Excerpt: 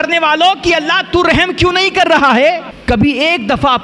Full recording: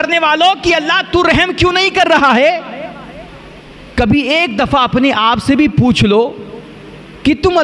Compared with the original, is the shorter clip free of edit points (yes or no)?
no